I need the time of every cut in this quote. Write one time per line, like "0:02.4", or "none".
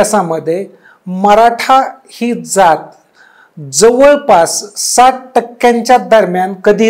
none